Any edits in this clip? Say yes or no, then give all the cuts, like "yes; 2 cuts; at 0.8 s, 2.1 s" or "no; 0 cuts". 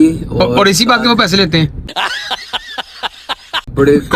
no; 0 cuts